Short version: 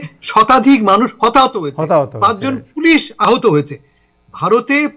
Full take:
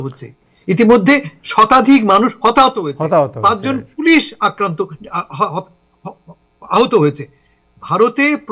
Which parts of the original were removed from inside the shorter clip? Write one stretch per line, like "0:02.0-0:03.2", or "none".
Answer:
0:04.4-0:06.6

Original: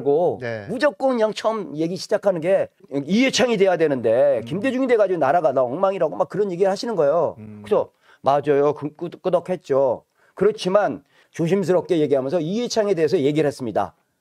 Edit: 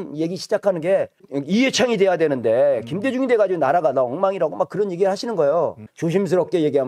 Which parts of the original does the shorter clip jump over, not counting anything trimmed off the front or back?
0:07.5-0:11.2

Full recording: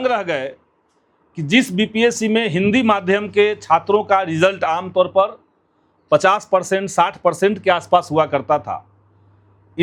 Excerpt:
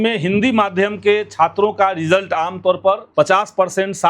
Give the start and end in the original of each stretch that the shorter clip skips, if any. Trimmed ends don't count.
0:05.4-0:06.0

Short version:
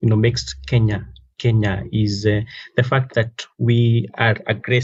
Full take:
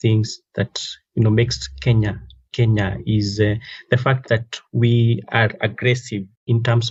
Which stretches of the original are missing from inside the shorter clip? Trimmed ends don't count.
none

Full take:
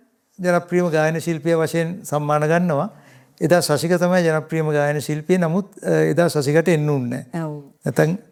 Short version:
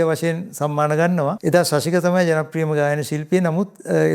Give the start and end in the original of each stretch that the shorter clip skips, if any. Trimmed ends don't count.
0:02.9-0:03.3

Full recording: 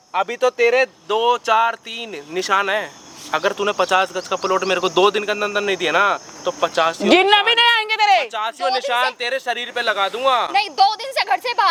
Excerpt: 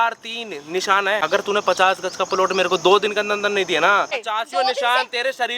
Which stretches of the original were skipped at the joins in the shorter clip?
0:02.8-0:03.3
0:06.3-0:08.3

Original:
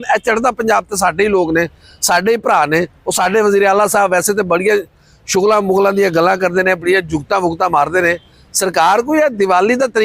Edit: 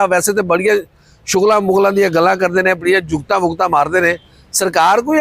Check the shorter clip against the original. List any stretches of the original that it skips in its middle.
none

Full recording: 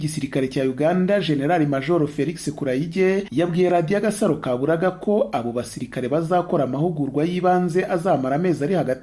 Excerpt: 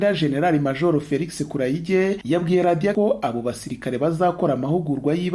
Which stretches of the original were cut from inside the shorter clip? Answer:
0:04.0-0:05.0

